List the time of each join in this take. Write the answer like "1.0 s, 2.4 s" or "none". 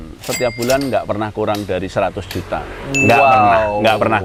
none